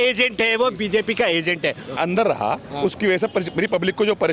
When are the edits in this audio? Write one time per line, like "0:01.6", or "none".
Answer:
0:02.0